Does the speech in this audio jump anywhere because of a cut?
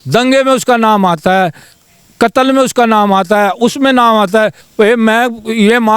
yes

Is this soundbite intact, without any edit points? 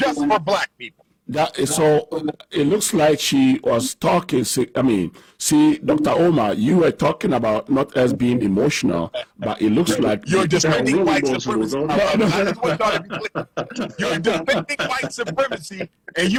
yes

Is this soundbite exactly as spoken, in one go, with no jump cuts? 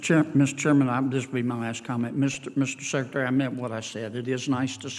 yes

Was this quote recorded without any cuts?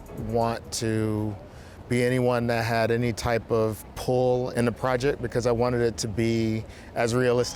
no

